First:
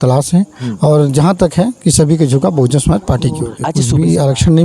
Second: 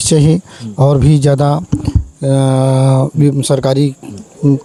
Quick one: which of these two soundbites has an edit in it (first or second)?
first